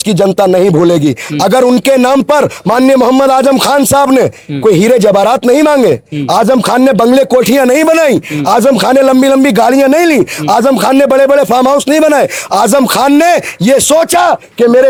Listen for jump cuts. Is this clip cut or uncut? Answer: uncut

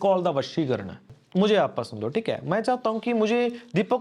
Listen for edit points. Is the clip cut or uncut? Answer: cut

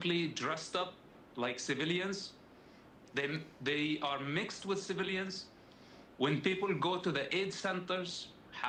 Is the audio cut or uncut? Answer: uncut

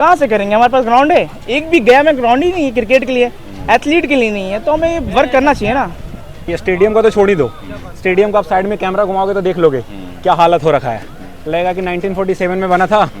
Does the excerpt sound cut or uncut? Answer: uncut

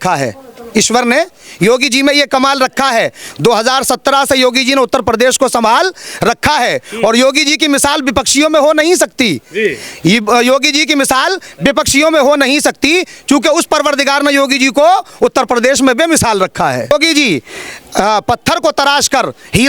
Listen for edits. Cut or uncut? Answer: cut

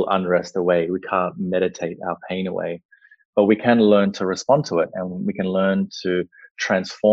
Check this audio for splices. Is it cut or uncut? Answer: uncut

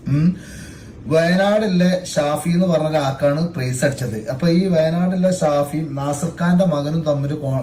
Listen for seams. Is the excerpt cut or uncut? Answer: uncut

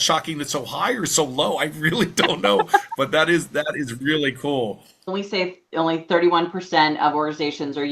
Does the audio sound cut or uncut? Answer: cut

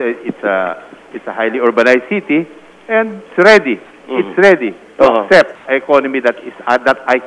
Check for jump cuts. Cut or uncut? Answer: cut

